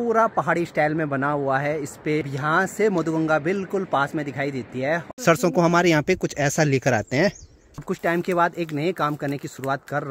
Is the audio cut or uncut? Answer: cut